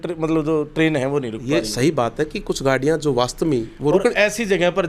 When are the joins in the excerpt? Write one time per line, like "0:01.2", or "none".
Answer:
none